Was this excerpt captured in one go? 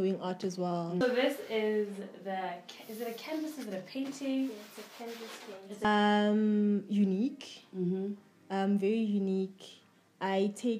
no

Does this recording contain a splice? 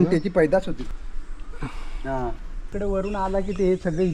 yes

